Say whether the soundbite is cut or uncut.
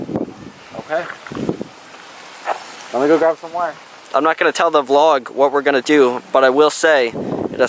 uncut